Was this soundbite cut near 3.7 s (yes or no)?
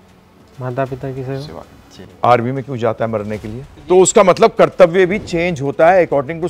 yes